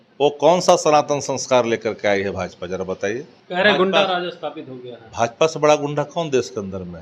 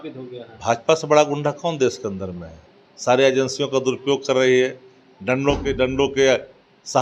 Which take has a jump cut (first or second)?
first